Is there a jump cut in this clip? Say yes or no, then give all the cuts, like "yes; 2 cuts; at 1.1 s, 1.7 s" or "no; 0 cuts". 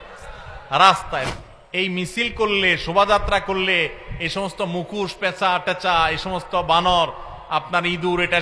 yes; 1 cut; at 1.2 s